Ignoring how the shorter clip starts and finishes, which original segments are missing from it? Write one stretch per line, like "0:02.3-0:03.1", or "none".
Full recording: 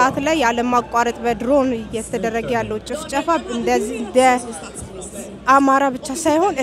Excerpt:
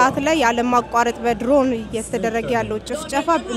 none